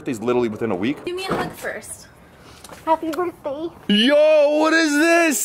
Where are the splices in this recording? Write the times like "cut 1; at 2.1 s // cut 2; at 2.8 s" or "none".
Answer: cut 1; at 1.1 s // cut 2; at 3.8 s